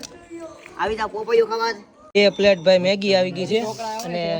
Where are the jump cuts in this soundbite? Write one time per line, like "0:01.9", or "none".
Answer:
0:01.9